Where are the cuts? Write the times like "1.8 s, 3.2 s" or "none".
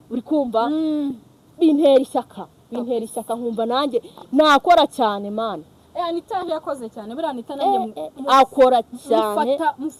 none